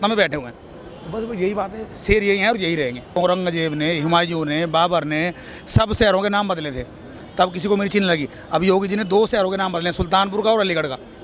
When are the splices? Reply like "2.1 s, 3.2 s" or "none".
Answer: 3.1 s